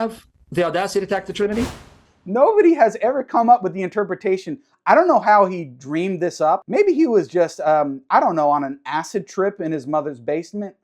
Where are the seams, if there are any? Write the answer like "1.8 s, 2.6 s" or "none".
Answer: 1.9 s, 6.6 s